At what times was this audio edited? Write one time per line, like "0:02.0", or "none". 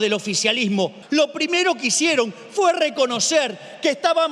0:01.0